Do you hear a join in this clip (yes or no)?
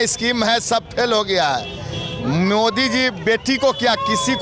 no